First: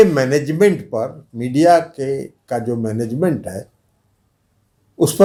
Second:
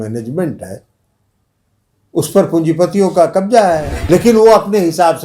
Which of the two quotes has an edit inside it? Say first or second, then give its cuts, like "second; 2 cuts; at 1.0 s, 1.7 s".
second; 1 cut; at 3.9 s